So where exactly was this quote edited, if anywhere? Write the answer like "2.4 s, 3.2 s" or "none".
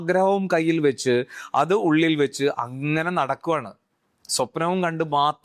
none